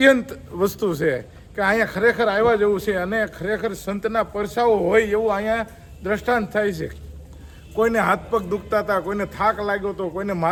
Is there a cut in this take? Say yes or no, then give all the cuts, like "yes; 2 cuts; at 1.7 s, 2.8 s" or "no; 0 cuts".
no; 0 cuts